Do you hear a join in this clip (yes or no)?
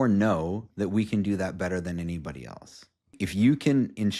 yes